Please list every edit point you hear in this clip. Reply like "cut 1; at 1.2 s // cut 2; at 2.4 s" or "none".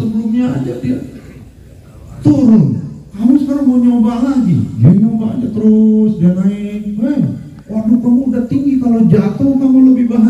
cut 1; at 3.0 s // cut 2; at 4.7 s